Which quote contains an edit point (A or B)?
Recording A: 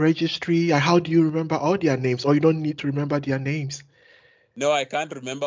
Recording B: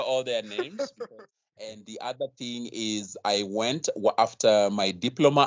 B